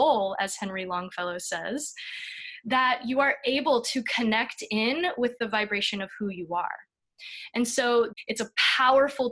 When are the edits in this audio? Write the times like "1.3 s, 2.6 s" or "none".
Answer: 8.1 s

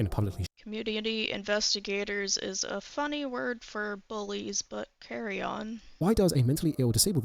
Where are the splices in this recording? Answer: 5.9 s

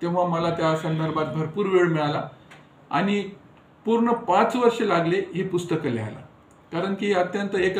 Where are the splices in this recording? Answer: none

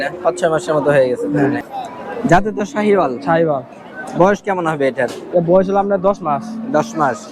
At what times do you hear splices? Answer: 1.7 s

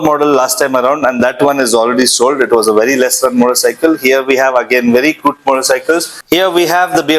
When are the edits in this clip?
6.1 s

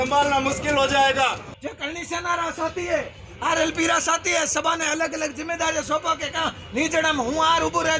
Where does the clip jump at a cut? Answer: 1.5 s

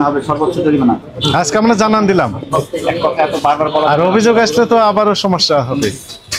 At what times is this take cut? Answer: none

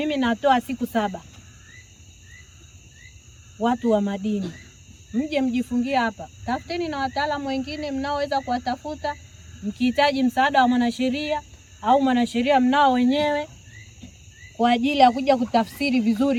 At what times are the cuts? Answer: none

